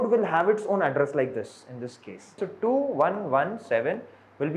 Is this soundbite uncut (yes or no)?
no